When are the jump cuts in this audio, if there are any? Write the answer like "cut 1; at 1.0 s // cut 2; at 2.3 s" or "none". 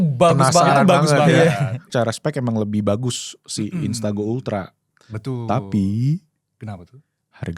cut 1; at 1.8 s // cut 2; at 4.8 s

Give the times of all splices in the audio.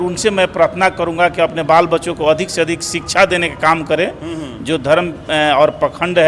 none

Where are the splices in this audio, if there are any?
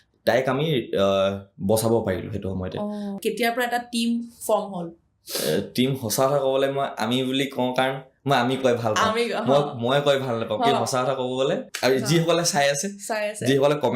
cut 1; at 3.2 s // cut 2; at 11.7 s

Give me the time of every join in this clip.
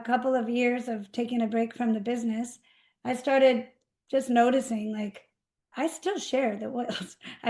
none

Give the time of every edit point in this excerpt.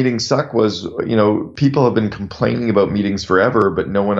cut 1; at 1.5 s

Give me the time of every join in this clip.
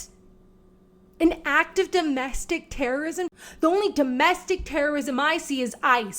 cut 1; at 3.3 s

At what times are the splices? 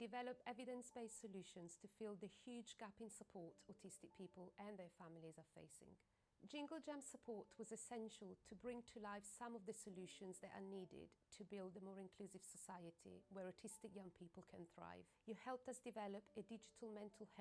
cut 1; at 7.8 s // cut 2; at 16.0 s

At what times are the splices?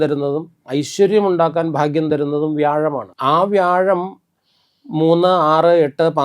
cut 1; at 3.1 s

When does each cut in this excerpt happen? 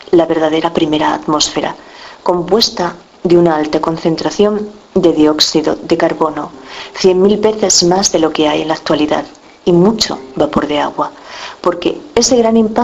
cut 1; at 4.7 s

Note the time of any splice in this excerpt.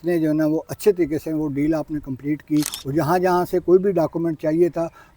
cut 1; at 2.8 s

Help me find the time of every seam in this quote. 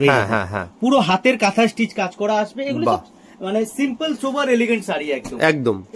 none

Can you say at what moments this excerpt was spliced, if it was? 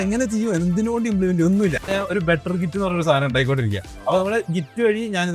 cut 1; at 1.9 s

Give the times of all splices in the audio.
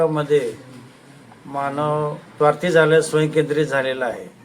cut 1; at 2.2 s

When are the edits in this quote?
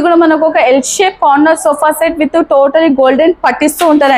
none

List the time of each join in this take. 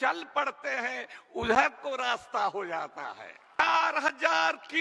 cut 1; at 3.6 s

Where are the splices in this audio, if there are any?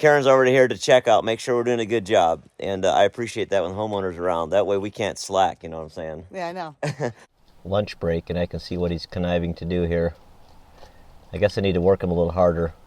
cut 1; at 7.2 s

